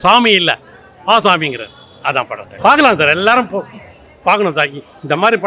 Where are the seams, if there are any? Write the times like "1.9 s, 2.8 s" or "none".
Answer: 2.4 s